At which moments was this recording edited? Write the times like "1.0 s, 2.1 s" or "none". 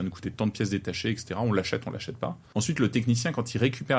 2.4 s